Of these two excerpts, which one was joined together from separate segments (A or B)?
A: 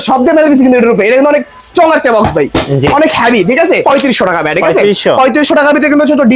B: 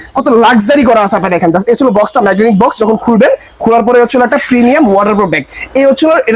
A